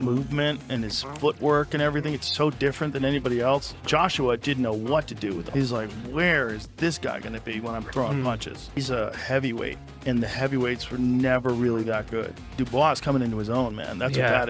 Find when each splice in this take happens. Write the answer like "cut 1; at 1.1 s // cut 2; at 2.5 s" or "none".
cut 1; at 12.3 s